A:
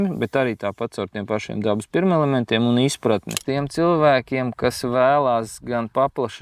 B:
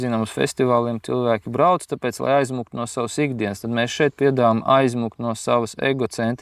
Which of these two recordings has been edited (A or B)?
A